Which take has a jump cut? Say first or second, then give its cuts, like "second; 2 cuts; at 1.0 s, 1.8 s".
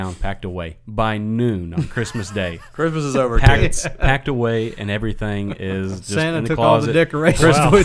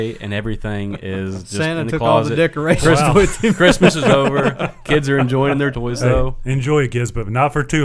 second; 1 cut; at 5.7 s